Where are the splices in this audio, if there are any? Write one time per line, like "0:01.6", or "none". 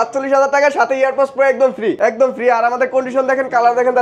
0:02.0